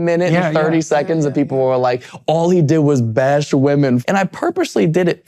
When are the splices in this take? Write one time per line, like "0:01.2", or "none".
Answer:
0:04.0